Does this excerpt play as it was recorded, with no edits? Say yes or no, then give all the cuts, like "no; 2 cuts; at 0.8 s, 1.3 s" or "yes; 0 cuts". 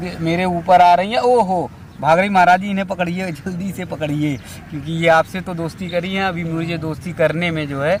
yes; 0 cuts